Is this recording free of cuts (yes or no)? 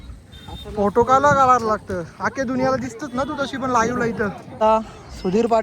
no